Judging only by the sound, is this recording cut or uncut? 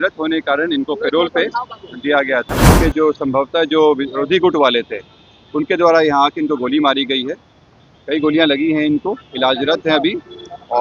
cut